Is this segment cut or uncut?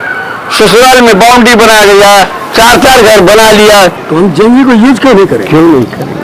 cut